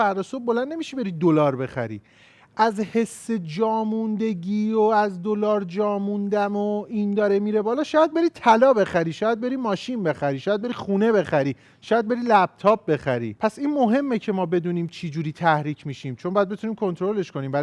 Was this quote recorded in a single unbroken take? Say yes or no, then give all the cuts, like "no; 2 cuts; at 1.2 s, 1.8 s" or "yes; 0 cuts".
yes; 0 cuts